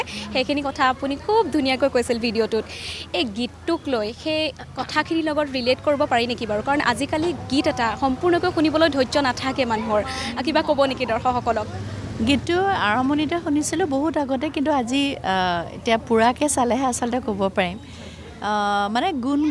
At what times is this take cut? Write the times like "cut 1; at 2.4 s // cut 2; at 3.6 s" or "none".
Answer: none